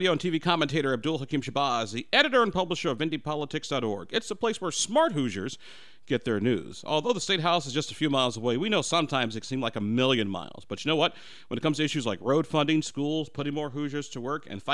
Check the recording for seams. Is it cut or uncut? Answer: uncut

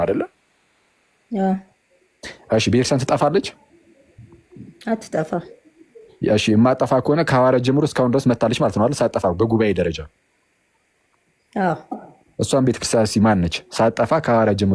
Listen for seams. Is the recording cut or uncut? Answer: uncut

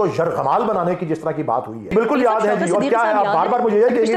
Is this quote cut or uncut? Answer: cut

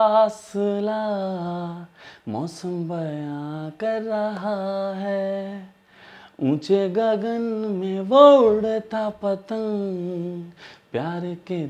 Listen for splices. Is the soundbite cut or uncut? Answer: uncut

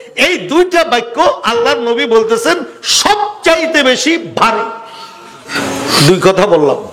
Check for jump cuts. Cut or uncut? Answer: cut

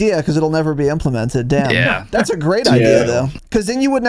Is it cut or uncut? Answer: uncut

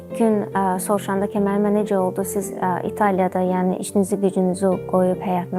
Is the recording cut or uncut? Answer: uncut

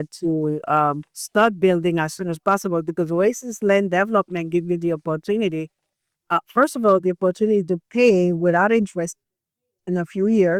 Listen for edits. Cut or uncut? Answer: uncut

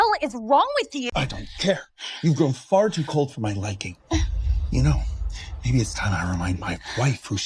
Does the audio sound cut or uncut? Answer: cut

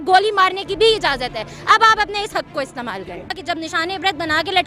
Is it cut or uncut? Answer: cut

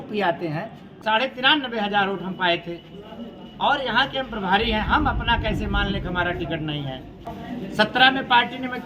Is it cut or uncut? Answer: cut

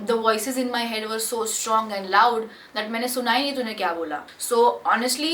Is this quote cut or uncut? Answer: uncut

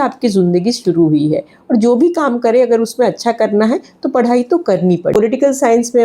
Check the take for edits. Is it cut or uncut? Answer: cut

